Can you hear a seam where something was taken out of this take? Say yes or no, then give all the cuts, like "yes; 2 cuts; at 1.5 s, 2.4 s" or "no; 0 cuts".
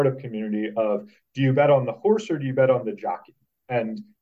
no; 0 cuts